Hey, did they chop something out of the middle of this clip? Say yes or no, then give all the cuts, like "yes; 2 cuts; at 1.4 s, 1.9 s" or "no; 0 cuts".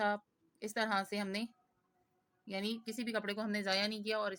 no; 0 cuts